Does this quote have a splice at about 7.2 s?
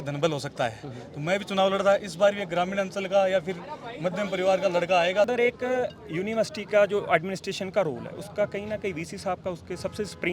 no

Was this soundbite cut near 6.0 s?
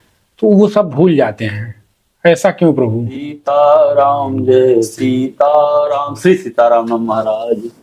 no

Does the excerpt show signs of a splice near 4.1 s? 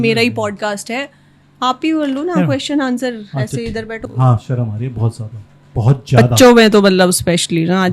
yes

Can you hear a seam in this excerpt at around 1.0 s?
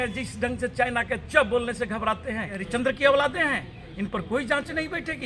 no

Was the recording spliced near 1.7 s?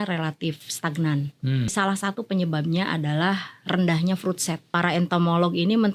yes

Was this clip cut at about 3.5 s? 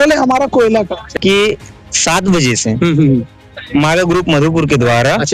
no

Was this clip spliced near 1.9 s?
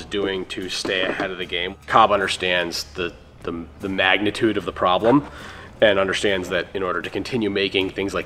yes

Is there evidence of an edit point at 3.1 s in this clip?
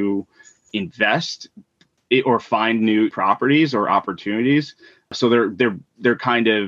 yes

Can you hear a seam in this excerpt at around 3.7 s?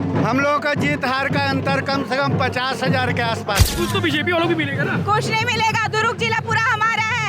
yes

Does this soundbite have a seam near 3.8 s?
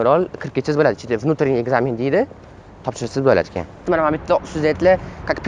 yes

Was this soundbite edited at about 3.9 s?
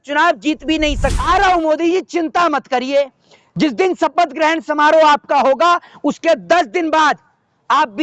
no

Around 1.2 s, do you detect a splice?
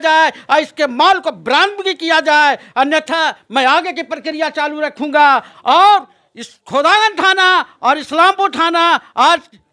no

